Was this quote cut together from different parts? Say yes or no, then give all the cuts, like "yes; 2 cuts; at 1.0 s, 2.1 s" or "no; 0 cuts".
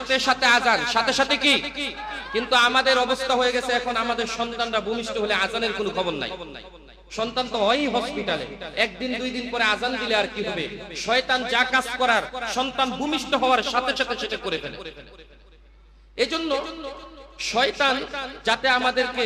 no; 0 cuts